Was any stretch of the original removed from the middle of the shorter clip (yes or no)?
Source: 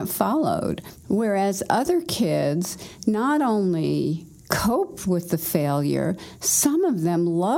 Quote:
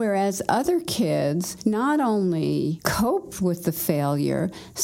yes